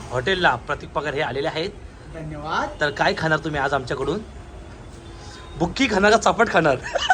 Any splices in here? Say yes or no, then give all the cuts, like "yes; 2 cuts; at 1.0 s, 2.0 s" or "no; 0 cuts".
no; 0 cuts